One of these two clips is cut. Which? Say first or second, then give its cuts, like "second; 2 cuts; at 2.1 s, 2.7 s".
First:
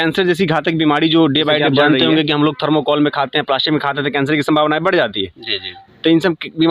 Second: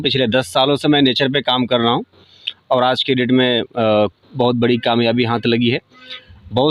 first; 1 cut; at 1.7 s